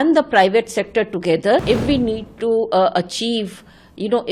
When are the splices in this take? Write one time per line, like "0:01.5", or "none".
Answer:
0:01.6